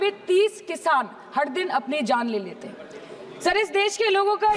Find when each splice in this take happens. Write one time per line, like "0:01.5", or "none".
none